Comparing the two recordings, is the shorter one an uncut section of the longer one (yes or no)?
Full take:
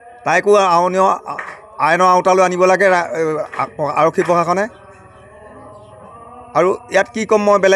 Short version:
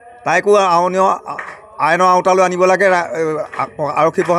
yes